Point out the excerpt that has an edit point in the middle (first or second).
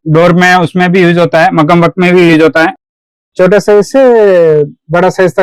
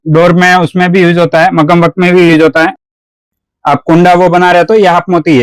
second